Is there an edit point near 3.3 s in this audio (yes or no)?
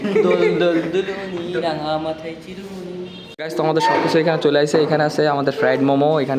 yes